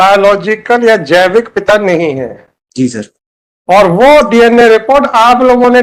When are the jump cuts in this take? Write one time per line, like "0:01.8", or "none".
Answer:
none